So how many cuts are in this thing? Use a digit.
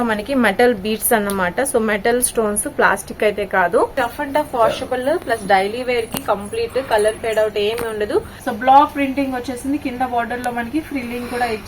2